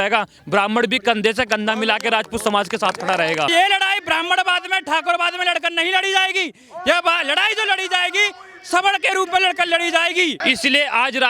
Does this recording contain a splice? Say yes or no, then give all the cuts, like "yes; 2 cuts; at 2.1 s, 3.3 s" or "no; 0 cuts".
yes; 2 cuts; at 3.5 s, 10.4 s